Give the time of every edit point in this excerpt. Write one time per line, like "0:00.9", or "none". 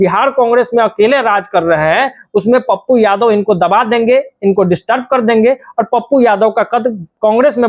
none